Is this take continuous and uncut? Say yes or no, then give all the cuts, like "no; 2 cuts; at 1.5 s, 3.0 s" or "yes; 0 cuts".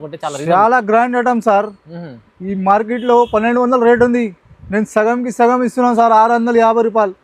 yes; 0 cuts